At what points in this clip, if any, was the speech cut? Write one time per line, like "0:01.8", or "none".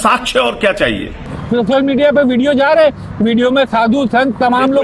0:01.4